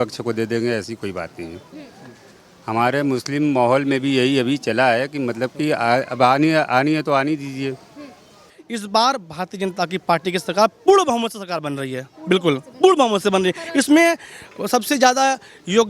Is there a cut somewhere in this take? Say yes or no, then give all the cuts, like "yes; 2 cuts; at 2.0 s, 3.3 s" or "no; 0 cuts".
yes; 1 cut; at 8.5 s